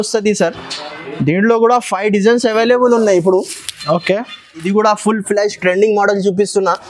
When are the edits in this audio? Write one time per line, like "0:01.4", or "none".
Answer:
0:04.6